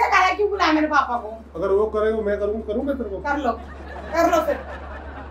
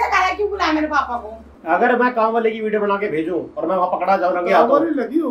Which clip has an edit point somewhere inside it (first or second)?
second